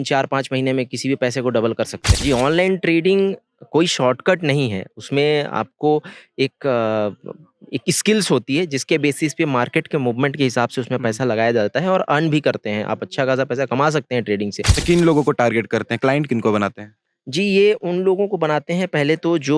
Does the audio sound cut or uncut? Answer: cut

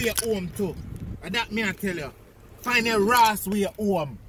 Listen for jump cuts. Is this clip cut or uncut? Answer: uncut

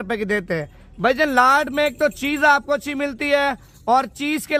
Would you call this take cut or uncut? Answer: uncut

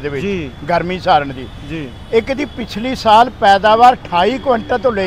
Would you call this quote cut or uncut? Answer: uncut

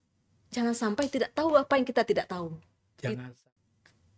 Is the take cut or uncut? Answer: cut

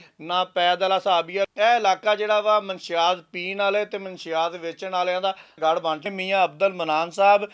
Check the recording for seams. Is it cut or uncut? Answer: cut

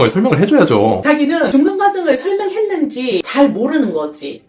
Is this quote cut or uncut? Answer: cut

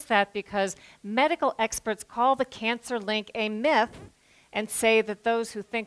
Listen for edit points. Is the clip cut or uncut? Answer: uncut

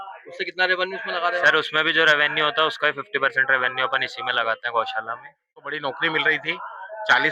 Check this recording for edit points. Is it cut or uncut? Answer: cut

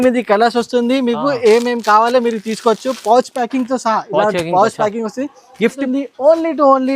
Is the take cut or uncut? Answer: cut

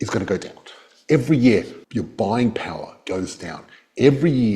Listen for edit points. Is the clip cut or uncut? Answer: cut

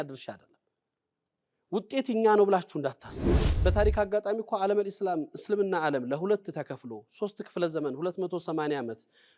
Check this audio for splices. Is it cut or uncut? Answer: cut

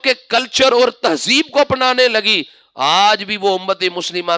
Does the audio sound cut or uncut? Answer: uncut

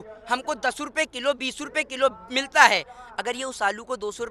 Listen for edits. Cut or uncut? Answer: uncut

